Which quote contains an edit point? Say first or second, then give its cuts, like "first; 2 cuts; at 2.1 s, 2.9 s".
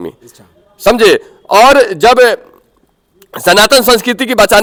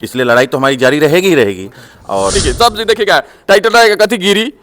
second; 1 cut; at 2.3 s